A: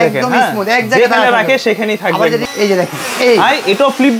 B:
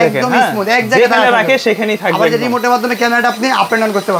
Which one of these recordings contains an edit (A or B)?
A